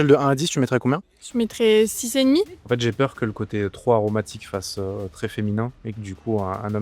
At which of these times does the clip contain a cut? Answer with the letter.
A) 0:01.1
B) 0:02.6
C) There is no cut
B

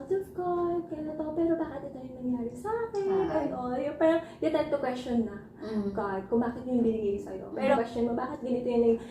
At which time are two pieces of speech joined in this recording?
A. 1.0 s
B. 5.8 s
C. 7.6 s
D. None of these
C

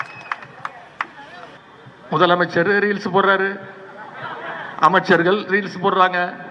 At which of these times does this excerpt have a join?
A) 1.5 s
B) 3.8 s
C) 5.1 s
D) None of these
A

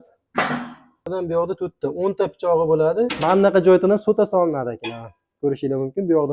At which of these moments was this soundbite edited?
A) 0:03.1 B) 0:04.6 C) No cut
A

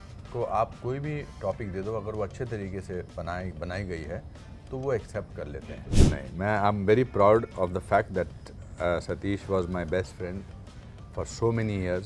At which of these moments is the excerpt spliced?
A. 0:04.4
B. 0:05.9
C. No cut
B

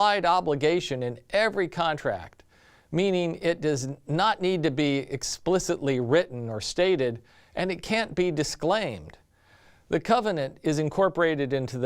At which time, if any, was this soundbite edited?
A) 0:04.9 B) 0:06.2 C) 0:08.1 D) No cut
C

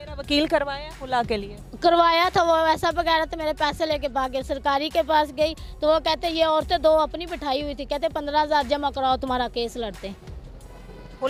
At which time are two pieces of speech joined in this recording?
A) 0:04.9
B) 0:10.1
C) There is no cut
C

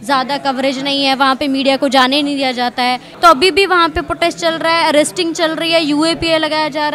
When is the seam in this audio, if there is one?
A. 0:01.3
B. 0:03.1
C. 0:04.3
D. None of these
B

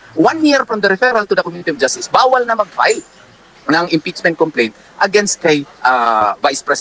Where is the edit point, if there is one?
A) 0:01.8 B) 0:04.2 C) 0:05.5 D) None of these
B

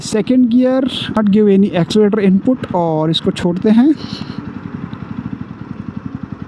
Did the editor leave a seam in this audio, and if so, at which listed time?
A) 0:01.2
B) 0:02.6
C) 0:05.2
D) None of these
A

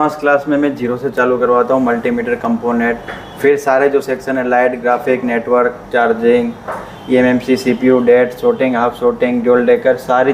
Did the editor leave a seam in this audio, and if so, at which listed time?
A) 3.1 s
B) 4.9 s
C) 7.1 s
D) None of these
D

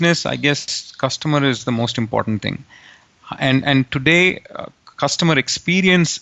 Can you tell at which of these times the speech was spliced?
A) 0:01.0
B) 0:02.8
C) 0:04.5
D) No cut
D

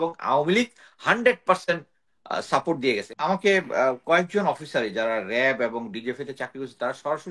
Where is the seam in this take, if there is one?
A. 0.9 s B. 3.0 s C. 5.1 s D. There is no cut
B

